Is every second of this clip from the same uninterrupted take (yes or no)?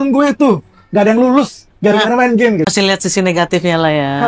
no